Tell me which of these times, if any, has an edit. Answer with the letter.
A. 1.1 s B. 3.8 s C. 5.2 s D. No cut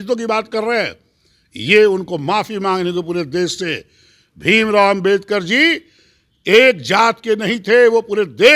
D